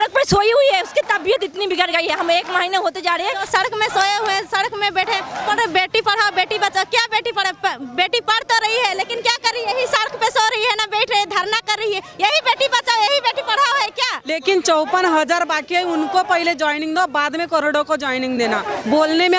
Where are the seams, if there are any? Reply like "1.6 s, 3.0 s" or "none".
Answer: 3.5 s, 5.5 s, 14.2 s